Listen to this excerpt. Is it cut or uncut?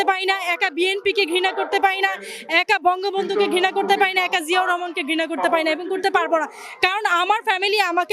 uncut